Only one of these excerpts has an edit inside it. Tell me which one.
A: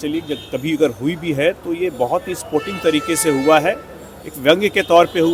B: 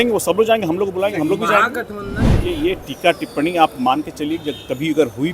B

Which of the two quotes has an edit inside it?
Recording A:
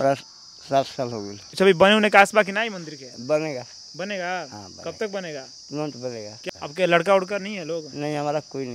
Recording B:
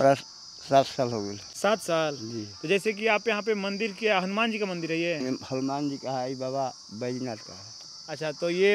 A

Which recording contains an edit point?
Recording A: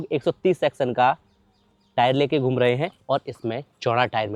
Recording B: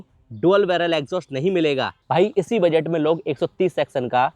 B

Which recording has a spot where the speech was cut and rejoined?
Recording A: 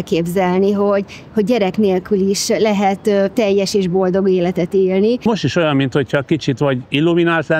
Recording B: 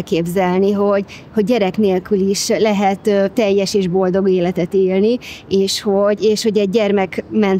A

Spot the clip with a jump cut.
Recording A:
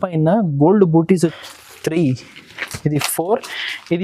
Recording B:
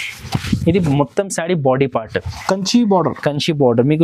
A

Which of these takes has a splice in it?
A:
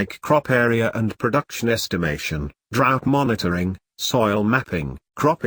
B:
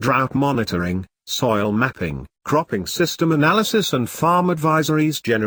A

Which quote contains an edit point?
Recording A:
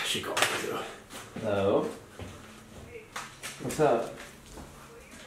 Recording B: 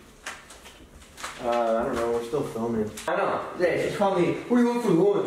B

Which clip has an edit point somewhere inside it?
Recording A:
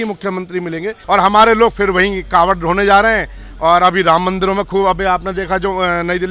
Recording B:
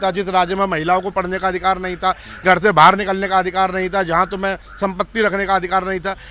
A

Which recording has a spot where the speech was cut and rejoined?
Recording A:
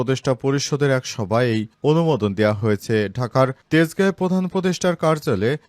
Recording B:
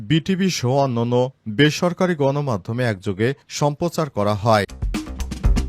B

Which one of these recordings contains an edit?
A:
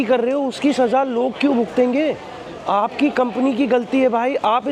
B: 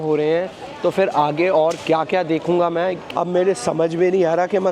B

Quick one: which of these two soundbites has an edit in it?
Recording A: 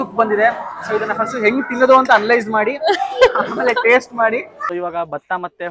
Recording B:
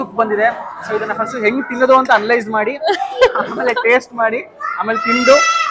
A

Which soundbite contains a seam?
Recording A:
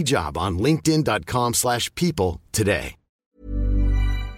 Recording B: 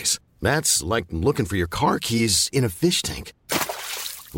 A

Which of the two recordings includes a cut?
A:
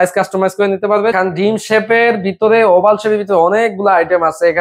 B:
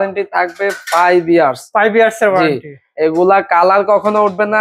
A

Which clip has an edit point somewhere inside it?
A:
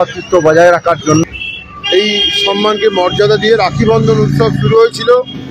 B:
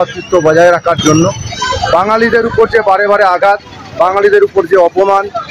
A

